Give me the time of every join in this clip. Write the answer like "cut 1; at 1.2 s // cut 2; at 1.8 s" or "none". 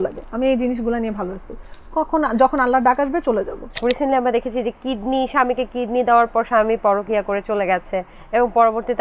cut 1; at 3.8 s